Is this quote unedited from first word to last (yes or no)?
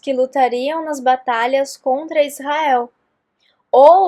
yes